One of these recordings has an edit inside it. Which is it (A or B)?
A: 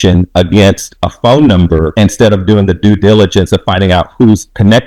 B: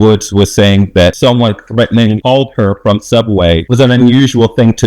B